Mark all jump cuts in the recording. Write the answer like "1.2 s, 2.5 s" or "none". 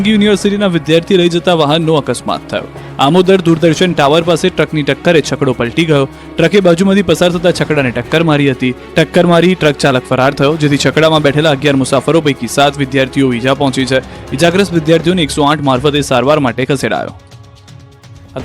10.7 s